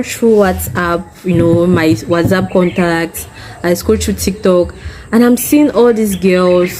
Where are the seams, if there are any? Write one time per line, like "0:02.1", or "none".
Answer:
none